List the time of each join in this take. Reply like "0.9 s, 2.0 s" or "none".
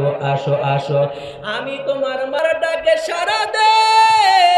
2.4 s